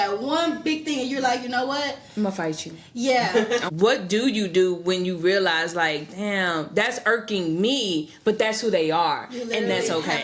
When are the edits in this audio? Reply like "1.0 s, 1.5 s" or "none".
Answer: 3.6 s